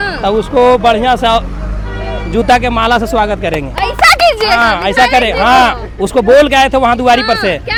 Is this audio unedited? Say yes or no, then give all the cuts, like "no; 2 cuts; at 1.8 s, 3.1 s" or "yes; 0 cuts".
yes; 0 cuts